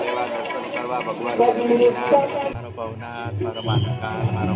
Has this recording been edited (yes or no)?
yes